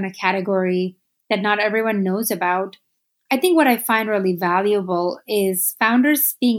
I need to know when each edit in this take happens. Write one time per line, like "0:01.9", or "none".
none